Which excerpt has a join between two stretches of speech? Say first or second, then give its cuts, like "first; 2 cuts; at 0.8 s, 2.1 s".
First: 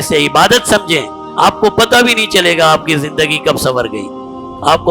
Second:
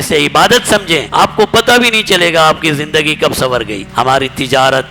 second; 2 cuts; at 1.1 s, 3.8 s